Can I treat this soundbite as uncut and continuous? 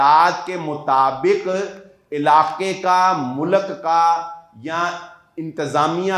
yes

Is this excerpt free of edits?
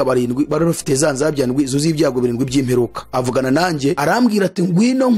no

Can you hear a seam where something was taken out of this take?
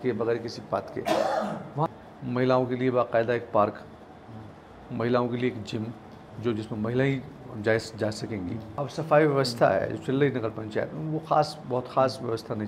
yes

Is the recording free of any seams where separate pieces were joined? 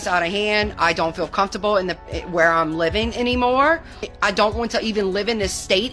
yes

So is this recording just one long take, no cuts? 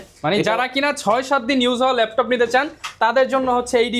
yes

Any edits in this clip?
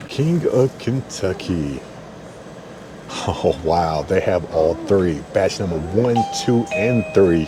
no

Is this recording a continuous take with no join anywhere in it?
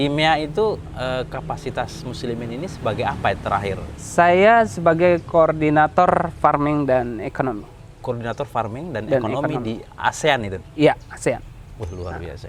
yes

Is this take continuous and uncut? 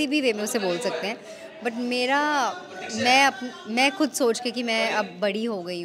yes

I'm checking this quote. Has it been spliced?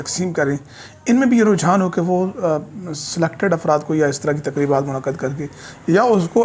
no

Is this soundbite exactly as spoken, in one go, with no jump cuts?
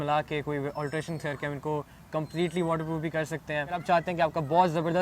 no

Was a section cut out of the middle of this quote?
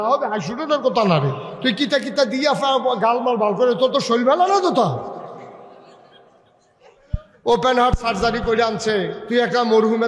yes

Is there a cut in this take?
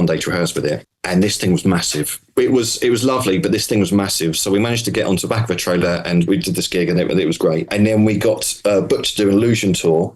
yes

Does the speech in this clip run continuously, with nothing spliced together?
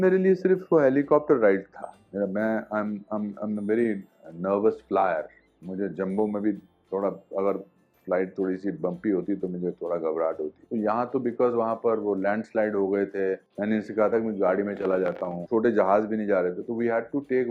yes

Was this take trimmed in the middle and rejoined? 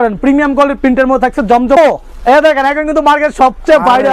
yes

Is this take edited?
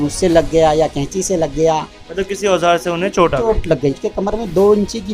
yes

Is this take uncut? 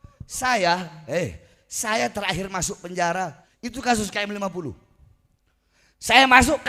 no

